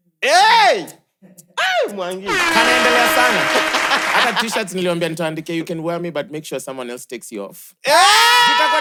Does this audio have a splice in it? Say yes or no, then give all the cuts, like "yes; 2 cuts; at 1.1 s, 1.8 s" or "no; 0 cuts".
no; 0 cuts